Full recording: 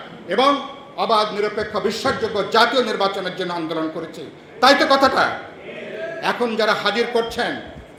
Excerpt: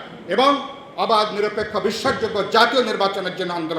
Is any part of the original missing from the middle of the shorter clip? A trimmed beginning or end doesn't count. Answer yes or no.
no